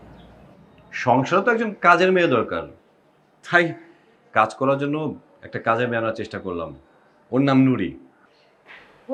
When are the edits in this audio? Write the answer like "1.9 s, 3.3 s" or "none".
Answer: none